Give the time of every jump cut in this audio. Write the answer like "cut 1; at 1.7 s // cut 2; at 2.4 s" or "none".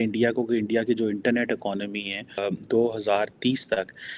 cut 1; at 2.4 s